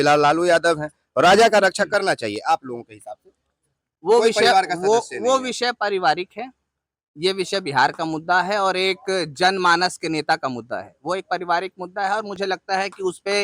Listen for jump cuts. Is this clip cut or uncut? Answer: uncut